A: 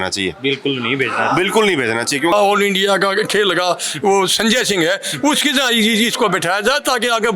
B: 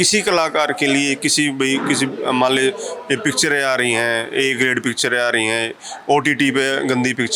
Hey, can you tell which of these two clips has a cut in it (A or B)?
A